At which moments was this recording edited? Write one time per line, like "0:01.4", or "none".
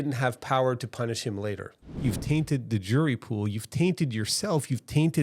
0:01.9